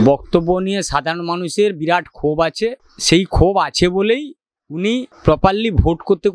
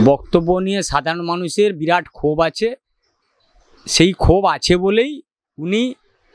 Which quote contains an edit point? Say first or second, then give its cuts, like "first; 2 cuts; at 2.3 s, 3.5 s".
first; 2 cuts; at 2.9 s, 5.1 s